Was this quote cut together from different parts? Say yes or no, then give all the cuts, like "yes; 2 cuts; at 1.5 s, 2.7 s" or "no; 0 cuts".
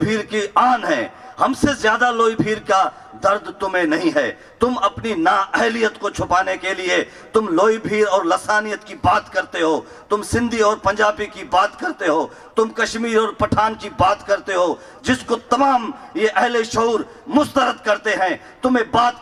no; 0 cuts